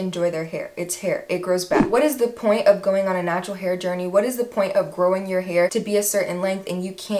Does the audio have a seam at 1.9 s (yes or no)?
yes